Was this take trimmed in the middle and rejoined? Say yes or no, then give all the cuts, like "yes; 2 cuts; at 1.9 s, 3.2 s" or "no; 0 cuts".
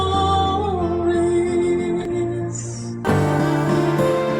yes; 1 cut; at 2.9 s